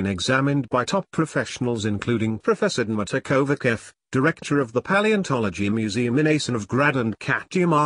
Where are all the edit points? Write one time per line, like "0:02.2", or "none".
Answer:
0:03.8

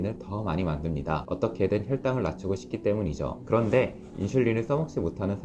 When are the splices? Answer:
0:01.2
0:03.4

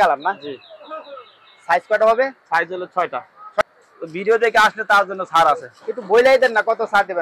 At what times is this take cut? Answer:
0:03.6

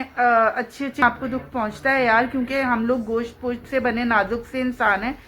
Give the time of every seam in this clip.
0:01.0

